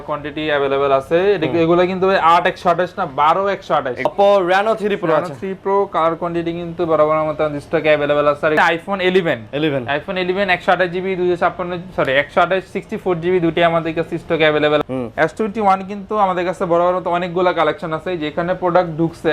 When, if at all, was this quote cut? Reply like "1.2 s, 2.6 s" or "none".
4.0 s, 8.6 s, 14.8 s